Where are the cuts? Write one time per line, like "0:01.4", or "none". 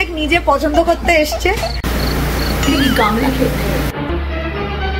0:03.9